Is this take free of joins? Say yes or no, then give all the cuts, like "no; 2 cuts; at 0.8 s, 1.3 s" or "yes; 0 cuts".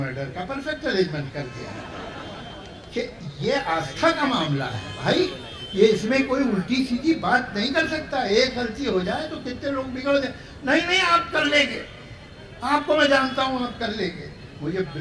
yes; 0 cuts